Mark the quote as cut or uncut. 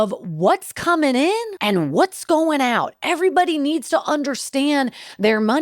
cut